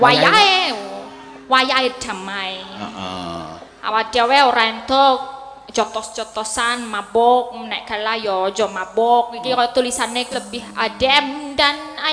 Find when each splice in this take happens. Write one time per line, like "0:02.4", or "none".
0:10.3